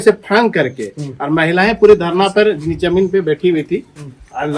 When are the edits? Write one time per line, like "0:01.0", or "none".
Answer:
none

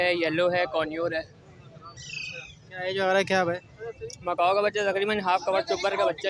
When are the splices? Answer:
none

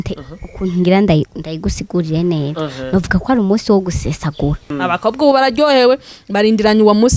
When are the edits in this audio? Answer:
0:04.7

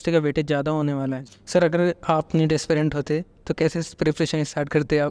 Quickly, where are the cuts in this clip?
0:01.2

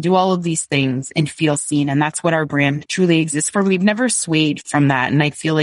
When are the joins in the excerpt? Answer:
0:01.1
0:02.8
0:04.6

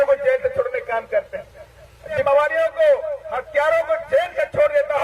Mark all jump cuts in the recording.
0:02.2

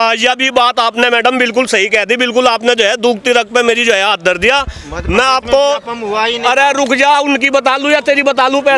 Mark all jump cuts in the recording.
none

